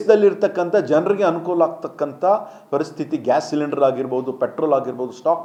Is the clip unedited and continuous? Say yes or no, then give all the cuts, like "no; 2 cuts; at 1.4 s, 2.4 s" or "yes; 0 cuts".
yes; 0 cuts